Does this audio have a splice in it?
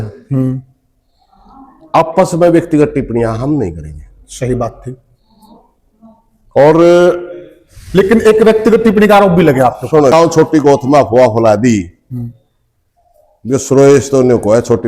yes; 1 cut; at 10.1 s

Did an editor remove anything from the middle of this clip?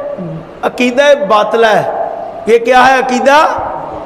no; 0 cuts

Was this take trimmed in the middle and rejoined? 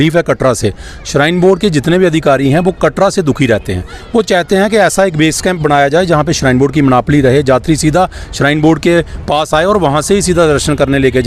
no; 0 cuts

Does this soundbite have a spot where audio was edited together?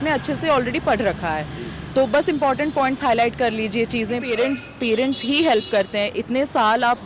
yes; 1 cut; at 4.3 s

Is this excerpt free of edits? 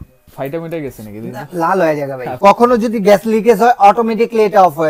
no; 1 cut; at 2.3 s

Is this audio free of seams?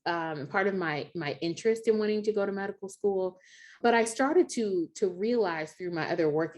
no; 1 cut; at 3.8 s

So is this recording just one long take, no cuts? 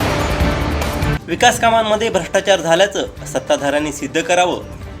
no; 1 cut; at 1.2 s

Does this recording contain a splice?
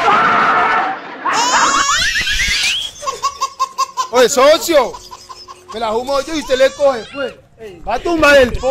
yes; 1 cut; at 1.3 s

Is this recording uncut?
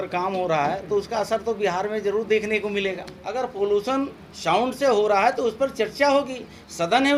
no; 1 cut; at 3.2 s

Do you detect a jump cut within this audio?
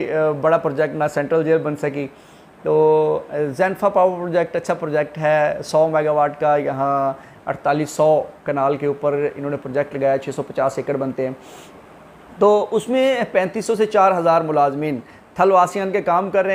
no; 0 cuts

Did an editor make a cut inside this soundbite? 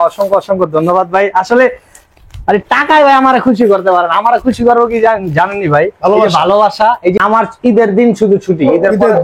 yes; 1 cut; at 7.2 s

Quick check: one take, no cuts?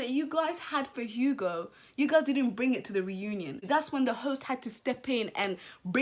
no; 1 cut; at 3.6 s

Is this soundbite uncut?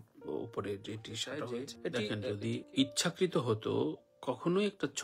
no; 1 cut; at 2.0 s

